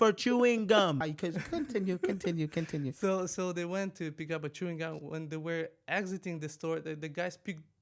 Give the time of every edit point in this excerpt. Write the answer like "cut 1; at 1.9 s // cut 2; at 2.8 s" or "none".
none